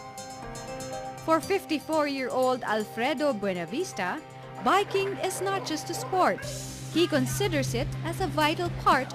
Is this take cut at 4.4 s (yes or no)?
yes